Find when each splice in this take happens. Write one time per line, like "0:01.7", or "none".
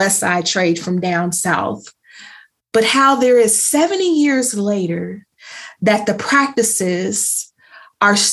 none